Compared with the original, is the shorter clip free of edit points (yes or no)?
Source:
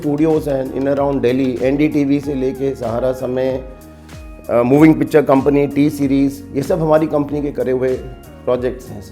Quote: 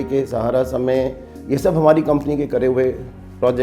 no